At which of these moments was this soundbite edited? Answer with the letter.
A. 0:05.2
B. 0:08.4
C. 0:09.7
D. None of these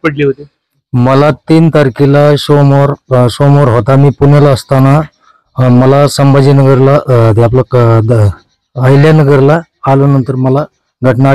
D